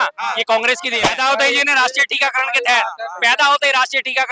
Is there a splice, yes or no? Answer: yes